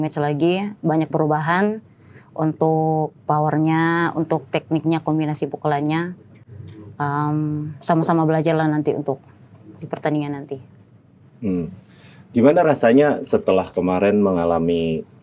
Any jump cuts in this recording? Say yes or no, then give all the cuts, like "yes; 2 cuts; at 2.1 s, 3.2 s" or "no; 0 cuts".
no; 0 cuts